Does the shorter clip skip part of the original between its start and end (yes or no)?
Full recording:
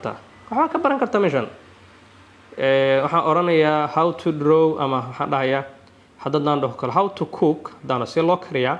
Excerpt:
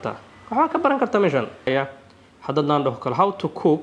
yes